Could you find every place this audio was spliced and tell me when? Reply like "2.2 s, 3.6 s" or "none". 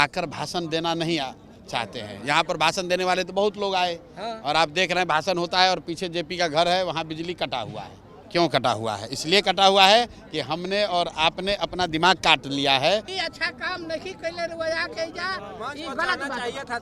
8.2 s, 13.1 s